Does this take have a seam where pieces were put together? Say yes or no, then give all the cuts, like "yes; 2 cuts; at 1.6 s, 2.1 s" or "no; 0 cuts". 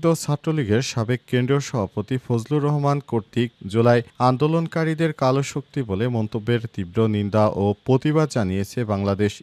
no; 0 cuts